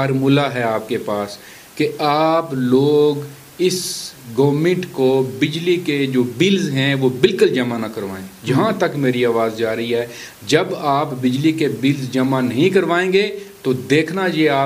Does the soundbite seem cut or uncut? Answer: uncut